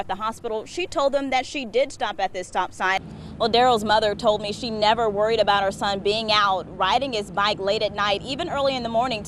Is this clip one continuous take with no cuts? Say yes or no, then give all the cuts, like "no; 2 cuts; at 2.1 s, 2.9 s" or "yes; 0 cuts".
no; 1 cut; at 3.0 s